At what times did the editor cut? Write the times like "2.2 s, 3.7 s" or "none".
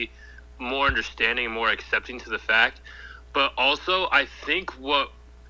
none